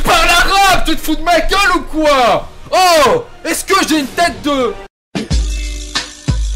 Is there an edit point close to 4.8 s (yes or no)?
yes